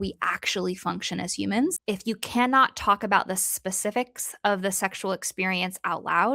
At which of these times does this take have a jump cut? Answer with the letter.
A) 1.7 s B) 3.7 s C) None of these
A